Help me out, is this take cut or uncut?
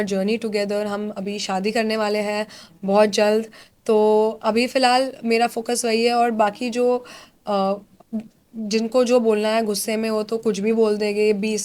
uncut